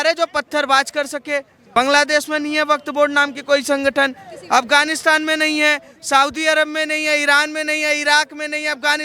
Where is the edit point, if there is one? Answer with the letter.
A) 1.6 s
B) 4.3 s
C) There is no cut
A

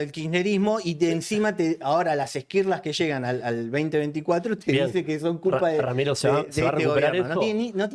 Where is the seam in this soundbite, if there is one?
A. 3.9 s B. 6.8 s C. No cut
C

